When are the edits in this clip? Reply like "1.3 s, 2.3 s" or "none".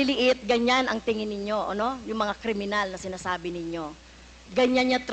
none